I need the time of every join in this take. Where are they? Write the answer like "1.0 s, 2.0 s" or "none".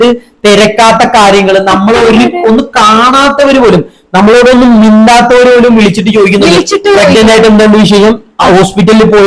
none